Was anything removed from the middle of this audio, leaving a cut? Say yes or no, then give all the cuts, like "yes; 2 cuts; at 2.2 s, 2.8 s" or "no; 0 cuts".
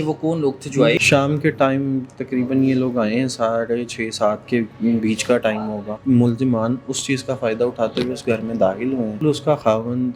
yes; 3 cuts; at 1.0 s, 5.9 s, 9.2 s